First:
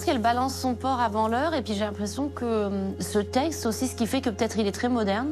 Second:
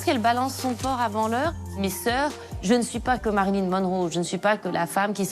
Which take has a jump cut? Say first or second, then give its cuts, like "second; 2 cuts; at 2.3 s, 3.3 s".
second; 1 cut; at 1.6 s